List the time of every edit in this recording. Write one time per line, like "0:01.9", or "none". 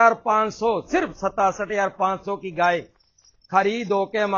none

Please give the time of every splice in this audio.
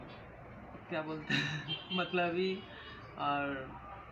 none

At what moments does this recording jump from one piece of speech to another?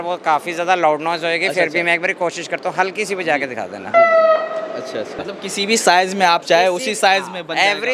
0:05.1

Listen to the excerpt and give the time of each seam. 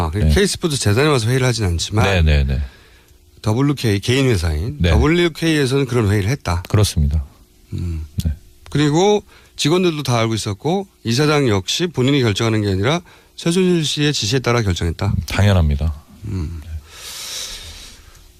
none

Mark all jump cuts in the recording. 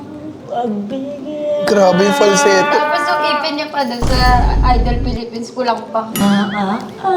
0:06.2

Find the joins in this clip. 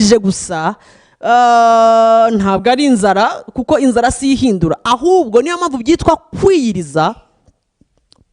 none

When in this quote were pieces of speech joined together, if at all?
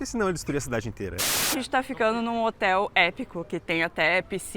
0:01.4

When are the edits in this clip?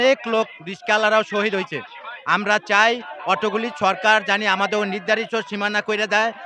none

